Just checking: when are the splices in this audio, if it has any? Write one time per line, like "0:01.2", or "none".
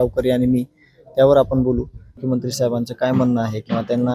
0:02.2